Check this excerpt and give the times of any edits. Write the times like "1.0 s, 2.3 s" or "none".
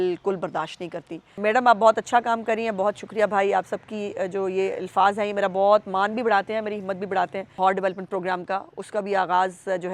1.4 s, 7.6 s